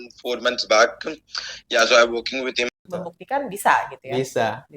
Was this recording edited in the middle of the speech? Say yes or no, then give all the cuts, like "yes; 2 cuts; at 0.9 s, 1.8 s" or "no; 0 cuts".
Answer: yes; 1 cut; at 2.7 s